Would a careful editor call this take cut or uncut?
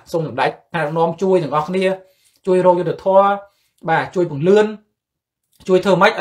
uncut